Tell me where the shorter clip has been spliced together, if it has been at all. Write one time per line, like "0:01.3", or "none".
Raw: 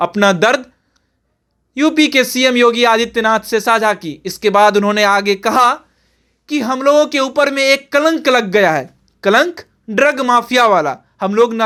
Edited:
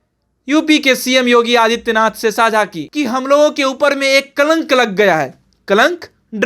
0:02.8